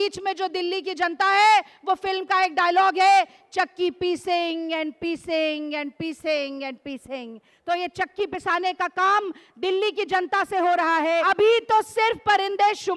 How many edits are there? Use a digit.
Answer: 1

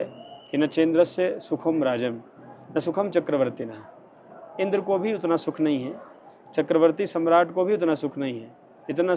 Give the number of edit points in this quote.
0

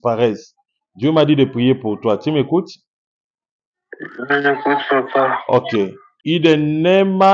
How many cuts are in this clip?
1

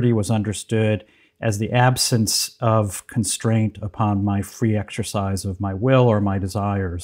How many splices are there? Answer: 0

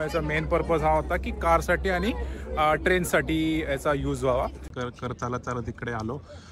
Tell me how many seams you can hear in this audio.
1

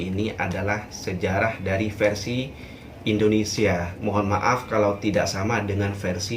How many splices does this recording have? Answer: 1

